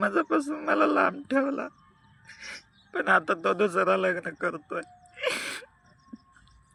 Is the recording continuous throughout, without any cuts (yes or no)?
yes